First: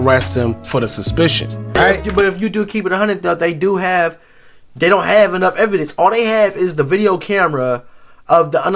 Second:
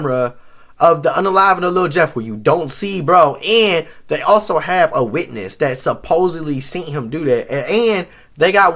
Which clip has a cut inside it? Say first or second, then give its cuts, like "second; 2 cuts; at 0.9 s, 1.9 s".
first; 1 cut; at 1.8 s